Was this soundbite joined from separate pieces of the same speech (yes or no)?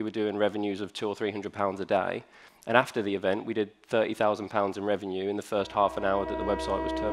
no